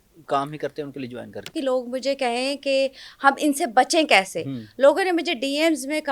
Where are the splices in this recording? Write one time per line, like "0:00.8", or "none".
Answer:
0:01.5